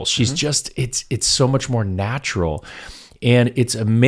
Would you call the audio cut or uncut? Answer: uncut